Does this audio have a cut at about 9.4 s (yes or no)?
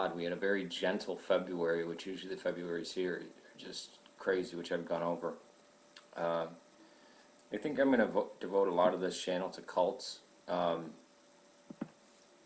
yes